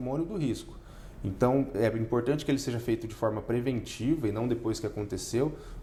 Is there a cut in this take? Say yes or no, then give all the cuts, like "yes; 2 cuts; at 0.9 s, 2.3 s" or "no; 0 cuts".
no; 0 cuts